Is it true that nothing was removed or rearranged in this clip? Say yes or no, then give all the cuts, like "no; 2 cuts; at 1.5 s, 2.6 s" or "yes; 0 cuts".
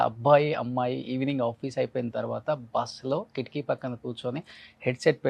yes; 0 cuts